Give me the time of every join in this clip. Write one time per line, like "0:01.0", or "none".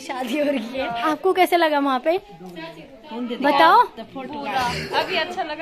0:01.0